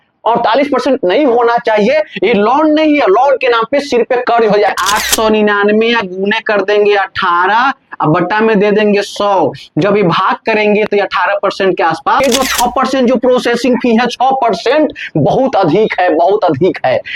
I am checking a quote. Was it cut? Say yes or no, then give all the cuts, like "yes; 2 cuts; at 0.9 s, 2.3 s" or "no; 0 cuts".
yes; 2 cuts; at 4.7 s, 12.2 s